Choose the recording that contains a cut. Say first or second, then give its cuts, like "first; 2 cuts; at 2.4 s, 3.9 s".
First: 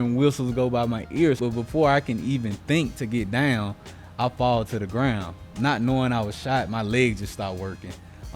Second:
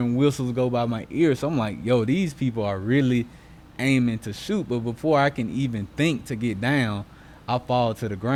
first; 1 cut; at 1.4 s